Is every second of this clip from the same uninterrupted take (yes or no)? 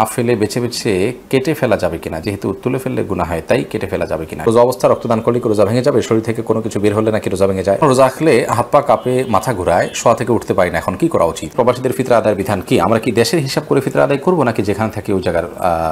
no